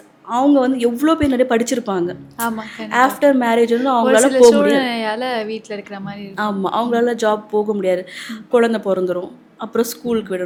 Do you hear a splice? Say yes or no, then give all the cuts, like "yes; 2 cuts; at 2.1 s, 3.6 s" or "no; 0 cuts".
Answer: no; 0 cuts